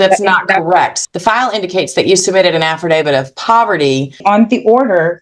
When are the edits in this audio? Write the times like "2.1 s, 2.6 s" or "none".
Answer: 1.0 s, 4.2 s

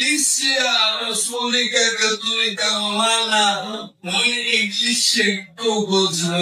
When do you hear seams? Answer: 2.8 s

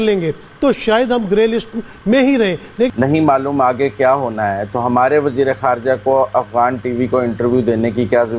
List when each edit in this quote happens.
2.9 s

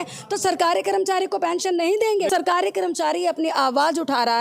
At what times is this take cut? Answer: 2.3 s

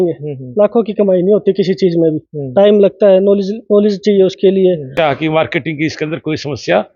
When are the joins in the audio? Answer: 4.9 s

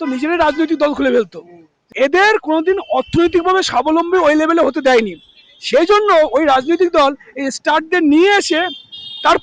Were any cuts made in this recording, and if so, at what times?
1.9 s

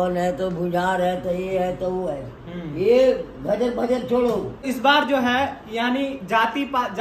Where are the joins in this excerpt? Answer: 4.6 s

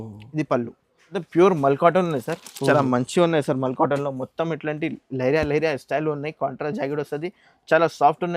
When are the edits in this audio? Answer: 1.2 s

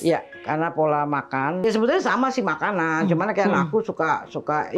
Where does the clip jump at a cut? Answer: 1.6 s

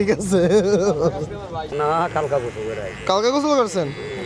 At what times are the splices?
1.7 s

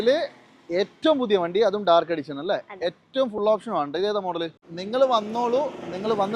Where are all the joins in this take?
4.7 s

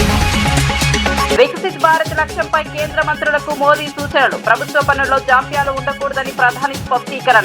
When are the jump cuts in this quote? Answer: 1.4 s

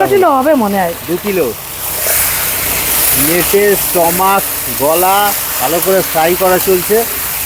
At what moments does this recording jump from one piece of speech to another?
none

